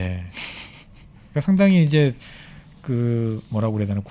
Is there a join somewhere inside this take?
no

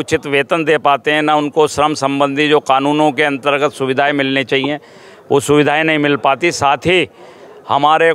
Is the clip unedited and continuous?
yes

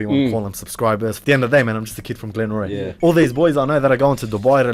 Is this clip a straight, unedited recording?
no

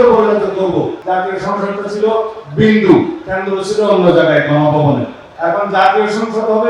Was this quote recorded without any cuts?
no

